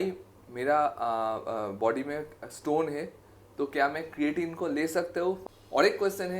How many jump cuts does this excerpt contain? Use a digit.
1